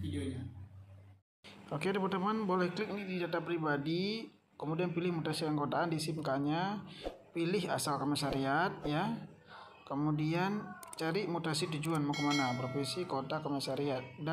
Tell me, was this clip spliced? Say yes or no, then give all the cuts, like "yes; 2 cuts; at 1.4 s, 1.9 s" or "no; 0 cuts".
no; 0 cuts